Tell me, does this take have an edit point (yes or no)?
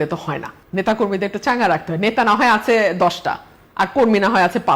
no